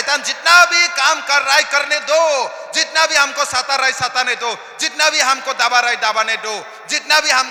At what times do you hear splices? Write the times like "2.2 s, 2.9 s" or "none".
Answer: none

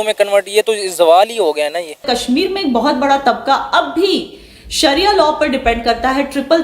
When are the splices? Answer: 2.0 s

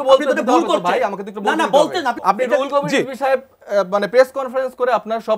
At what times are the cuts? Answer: 2.2 s

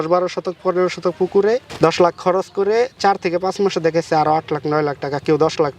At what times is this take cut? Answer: 1.7 s

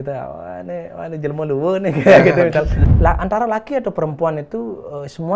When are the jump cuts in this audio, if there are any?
2.8 s

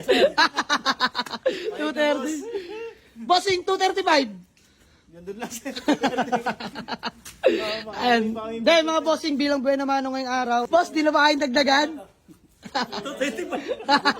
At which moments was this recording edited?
10.7 s

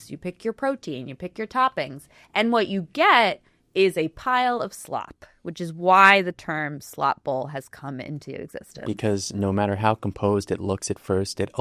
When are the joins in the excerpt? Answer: none

